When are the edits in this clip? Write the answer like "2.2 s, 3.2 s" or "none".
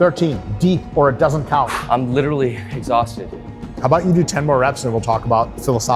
1.7 s